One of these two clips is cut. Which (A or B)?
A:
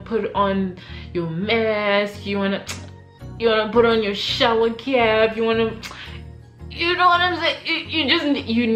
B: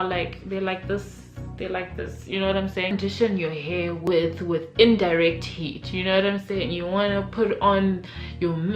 B